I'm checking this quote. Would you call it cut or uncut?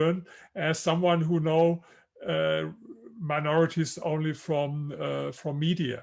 uncut